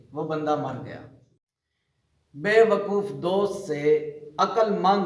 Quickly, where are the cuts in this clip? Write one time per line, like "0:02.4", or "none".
0:01.2